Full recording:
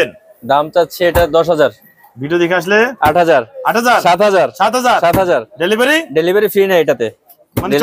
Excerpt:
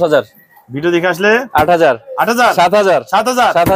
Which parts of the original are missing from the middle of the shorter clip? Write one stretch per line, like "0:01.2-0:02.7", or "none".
none